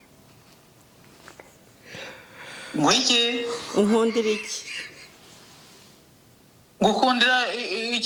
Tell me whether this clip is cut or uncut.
uncut